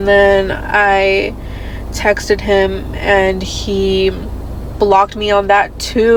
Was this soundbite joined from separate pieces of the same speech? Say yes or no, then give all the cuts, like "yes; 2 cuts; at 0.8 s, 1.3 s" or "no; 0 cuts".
no; 0 cuts